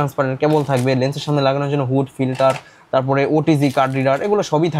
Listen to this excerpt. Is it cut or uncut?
uncut